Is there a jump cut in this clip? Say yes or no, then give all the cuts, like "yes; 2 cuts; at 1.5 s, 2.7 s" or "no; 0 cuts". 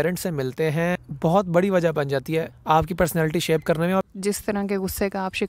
yes; 3 cuts; at 1.1 s, 2.5 s, 4.1 s